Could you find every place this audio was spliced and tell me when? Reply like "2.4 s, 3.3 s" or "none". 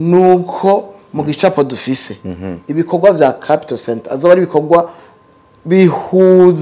none

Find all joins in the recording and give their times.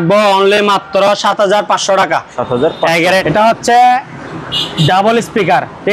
3.2 s

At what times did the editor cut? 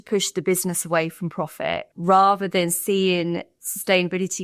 1.9 s

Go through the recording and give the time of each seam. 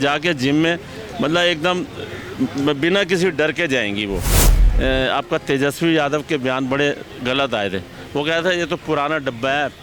4.6 s

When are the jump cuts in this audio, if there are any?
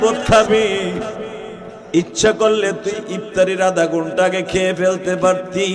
none

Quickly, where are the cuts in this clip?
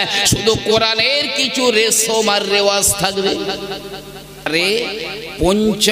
4.5 s

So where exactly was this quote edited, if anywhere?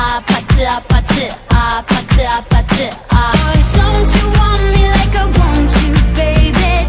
3.3 s

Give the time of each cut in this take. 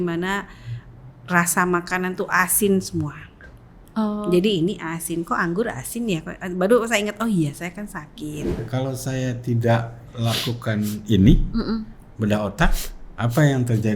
8.5 s

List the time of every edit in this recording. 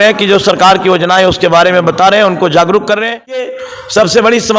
3.5 s

